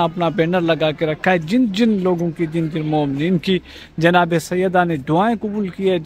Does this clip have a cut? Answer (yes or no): no